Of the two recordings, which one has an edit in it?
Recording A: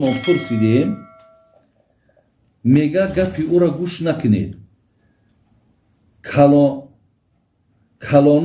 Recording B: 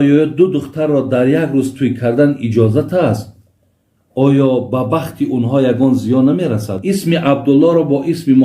B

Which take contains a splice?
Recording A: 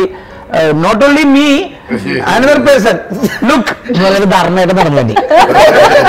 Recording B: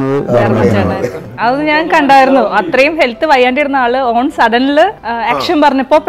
B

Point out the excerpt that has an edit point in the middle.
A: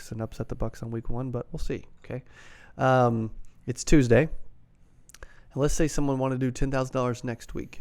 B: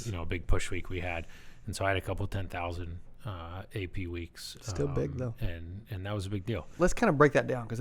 B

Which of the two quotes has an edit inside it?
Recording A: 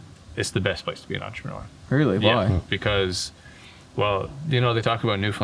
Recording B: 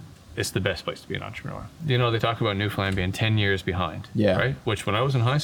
B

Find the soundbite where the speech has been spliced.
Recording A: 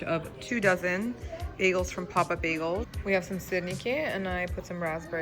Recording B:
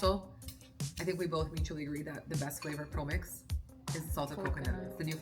A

